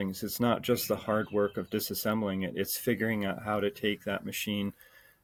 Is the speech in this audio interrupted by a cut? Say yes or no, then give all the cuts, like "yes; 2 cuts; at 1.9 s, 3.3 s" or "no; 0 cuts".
no; 0 cuts